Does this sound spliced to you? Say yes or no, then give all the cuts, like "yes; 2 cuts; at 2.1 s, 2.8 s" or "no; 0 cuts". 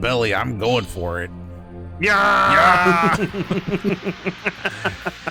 no; 0 cuts